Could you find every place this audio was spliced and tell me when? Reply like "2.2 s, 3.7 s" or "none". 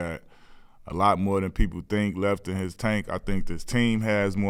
2.7 s